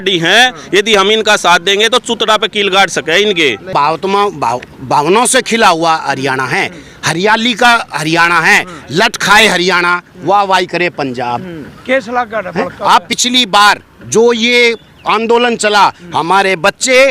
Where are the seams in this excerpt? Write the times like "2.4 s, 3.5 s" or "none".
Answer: 3.7 s, 13.2 s